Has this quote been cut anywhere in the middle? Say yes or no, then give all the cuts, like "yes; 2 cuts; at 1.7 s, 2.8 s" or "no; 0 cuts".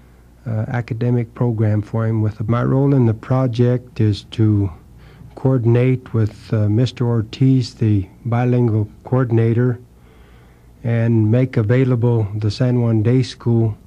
no; 0 cuts